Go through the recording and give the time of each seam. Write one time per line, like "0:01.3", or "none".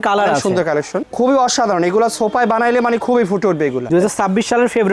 0:01.1
0:03.8

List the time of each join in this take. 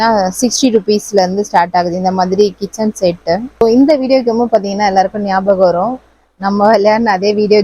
none

